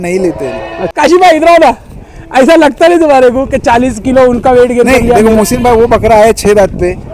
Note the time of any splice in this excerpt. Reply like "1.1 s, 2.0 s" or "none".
0.9 s